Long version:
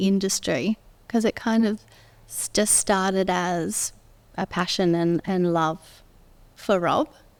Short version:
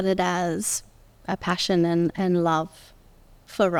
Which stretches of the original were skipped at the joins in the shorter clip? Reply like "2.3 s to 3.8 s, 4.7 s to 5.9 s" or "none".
none